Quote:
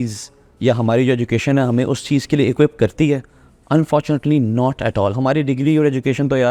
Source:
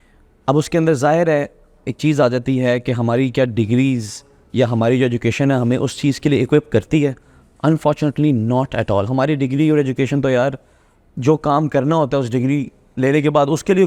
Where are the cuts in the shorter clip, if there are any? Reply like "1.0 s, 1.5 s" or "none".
none